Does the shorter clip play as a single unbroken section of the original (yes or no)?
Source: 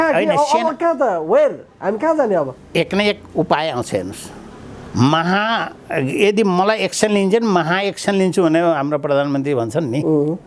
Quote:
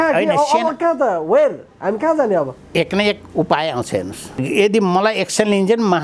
no